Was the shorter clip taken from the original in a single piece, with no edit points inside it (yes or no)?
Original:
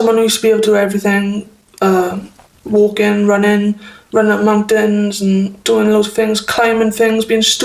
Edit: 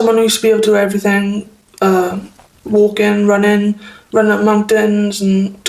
yes